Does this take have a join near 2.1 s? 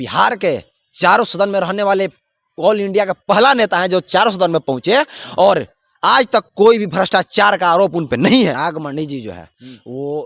no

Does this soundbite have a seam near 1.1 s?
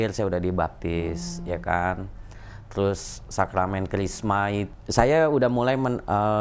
no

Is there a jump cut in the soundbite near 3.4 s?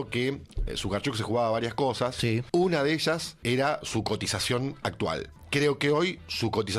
yes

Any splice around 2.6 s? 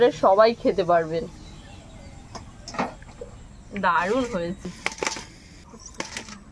no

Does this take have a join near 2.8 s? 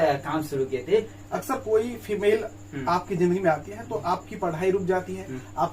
no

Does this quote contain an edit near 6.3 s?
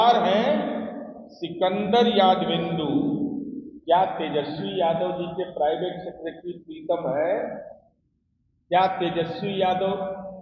no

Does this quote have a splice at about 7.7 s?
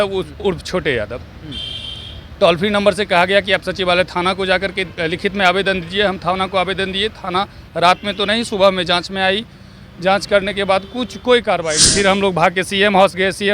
no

